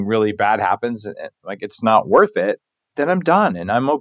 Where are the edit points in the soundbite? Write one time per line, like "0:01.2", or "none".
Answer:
none